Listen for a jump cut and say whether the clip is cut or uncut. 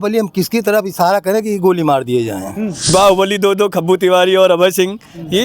cut